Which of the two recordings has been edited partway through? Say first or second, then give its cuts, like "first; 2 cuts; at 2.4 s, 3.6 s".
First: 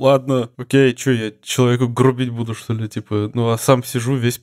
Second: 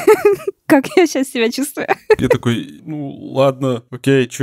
second; 1 cut; at 2.4 s